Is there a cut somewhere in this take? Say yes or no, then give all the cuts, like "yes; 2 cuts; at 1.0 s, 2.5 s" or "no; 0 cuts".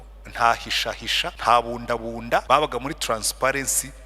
yes; 2 cuts; at 1.4 s, 2.4 s